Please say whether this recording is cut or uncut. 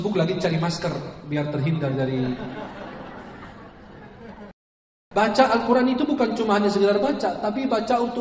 cut